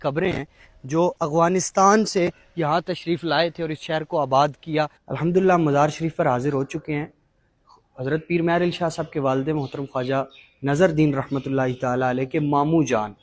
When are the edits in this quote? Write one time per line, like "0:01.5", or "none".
0:05.0